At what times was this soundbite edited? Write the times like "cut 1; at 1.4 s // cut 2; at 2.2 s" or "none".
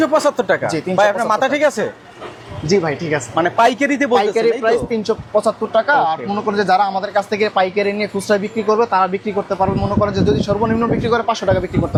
none